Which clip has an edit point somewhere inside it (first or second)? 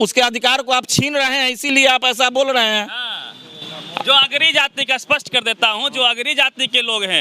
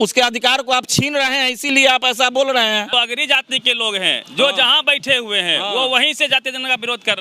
second